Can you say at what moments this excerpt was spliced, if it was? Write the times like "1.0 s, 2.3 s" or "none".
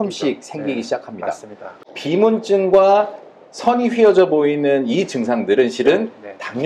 1.7 s